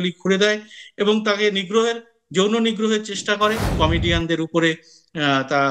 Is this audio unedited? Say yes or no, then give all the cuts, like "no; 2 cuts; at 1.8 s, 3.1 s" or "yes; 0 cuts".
no; 1 cut; at 3.7 s